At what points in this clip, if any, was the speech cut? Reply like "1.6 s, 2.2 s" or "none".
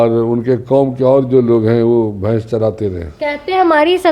3.1 s